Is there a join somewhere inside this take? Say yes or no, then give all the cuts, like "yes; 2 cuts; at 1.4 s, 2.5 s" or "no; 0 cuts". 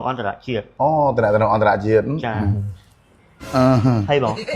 no; 0 cuts